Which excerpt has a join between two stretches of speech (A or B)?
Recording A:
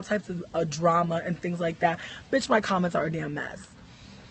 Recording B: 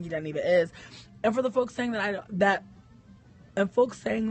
A